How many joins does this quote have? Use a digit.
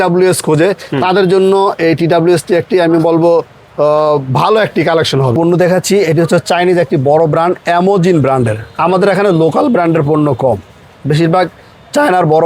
1